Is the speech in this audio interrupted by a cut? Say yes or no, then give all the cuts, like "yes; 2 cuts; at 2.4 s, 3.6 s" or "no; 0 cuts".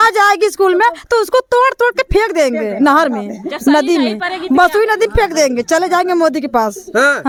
no; 0 cuts